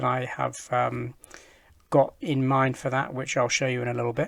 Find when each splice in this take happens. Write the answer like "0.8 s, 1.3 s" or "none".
none